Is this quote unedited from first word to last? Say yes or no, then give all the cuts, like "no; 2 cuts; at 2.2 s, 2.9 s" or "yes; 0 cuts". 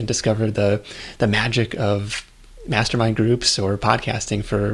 yes; 0 cuts